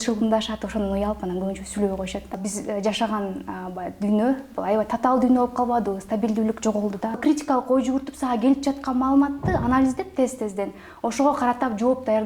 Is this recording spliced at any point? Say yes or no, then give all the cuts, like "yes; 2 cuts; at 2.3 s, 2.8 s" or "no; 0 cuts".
yes; 2 cuts; at 2.4 s, 7.2 s